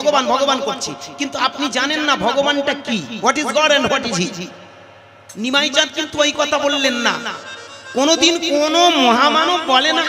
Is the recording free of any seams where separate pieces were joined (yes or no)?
yes